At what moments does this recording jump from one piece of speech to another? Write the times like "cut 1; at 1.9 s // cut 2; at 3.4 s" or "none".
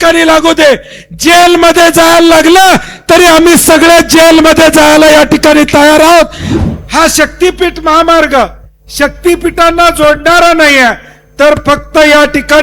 cut 1; at 6.5 s